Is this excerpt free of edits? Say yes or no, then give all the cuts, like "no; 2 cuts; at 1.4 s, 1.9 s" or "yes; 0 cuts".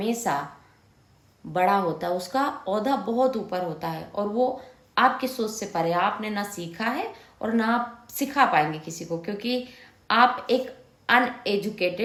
yes; 0 cuts